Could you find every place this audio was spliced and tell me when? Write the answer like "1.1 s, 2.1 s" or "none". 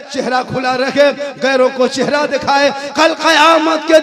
none